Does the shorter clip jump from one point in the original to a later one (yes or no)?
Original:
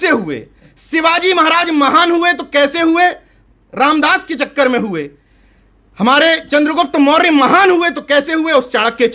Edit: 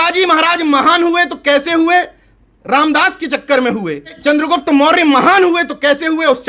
yes